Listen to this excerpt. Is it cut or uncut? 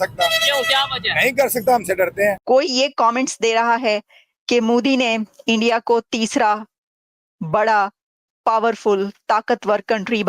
cut